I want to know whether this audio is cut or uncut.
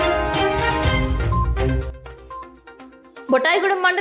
uncut